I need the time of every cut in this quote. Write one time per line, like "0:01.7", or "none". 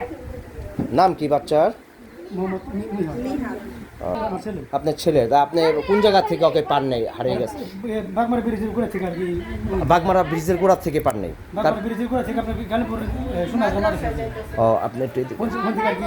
0:04.2

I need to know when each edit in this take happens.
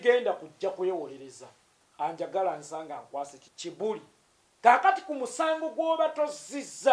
0:03.5

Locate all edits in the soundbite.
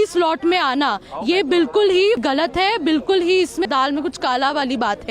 0:02.2
0:03.7

